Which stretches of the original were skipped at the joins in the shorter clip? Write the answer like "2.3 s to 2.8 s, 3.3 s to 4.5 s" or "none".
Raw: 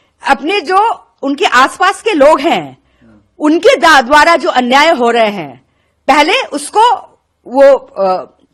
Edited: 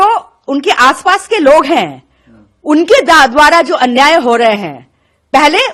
none